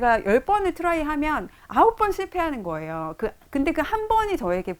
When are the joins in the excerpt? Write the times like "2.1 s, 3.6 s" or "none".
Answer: none